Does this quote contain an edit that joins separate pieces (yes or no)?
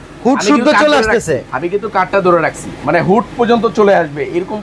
yes